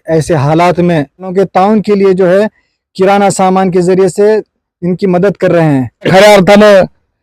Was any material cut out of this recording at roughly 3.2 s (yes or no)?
no